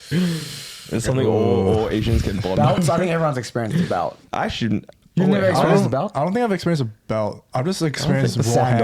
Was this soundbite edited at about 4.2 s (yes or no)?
yes